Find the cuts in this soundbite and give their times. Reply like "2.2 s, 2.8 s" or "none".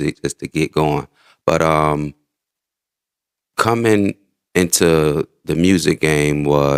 none